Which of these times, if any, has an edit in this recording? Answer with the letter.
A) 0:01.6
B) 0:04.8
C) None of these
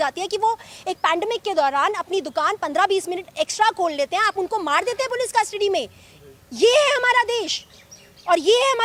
C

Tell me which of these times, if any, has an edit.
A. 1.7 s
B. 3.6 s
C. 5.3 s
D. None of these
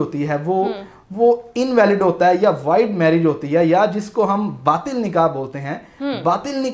D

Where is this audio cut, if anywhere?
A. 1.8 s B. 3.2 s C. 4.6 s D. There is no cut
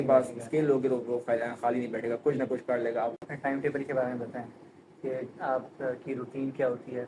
B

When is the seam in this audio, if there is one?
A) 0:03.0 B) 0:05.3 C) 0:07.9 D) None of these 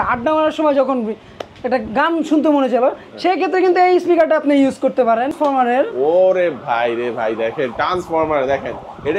B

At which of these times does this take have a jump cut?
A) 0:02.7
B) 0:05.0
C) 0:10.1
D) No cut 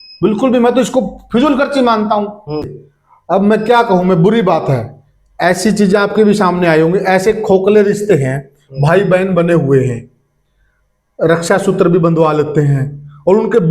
A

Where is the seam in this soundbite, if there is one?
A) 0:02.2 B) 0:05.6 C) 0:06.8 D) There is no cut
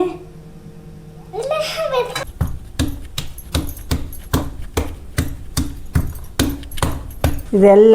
A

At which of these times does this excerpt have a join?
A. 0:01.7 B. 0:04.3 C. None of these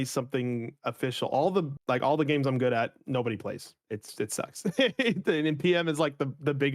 A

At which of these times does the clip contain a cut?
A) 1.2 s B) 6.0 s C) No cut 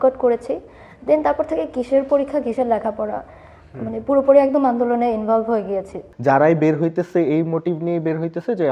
B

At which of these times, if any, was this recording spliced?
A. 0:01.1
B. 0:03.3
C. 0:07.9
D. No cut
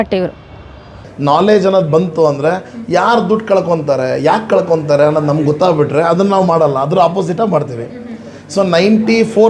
A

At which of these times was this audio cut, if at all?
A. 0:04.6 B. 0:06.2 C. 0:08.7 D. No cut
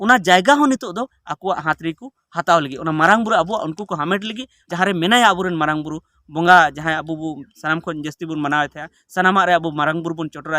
A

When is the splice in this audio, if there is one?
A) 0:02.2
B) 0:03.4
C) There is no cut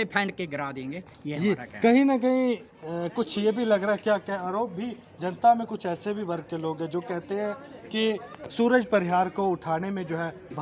C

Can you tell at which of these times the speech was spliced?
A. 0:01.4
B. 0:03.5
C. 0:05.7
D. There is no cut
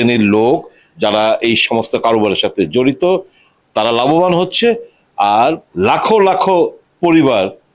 C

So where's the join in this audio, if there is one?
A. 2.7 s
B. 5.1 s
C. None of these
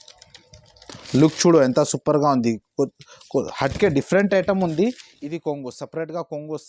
B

